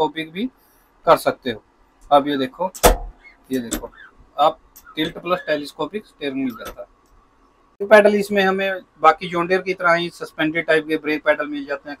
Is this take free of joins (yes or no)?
yes